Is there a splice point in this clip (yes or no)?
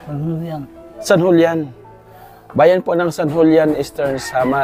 no